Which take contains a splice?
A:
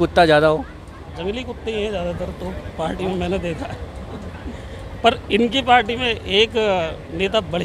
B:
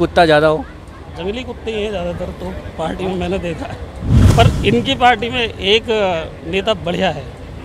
B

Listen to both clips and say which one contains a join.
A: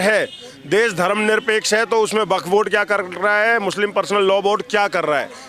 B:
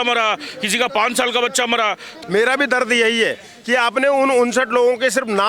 B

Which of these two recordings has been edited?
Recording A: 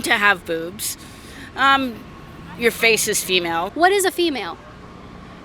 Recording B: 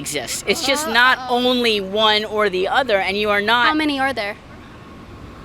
A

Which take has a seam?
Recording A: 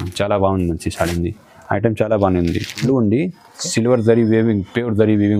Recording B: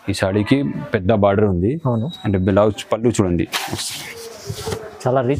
A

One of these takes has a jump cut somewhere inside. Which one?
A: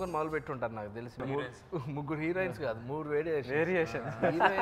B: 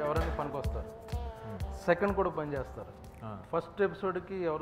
A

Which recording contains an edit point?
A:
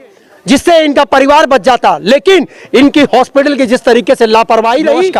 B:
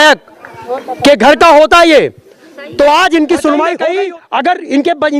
B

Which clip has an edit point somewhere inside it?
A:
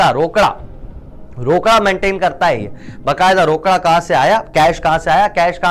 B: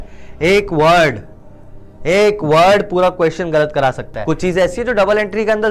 B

